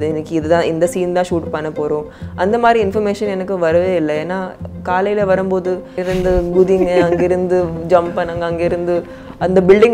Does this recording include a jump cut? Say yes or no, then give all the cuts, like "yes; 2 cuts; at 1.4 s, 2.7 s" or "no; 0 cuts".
no; 0 cuts